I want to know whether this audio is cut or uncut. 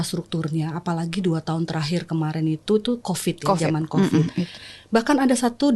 cut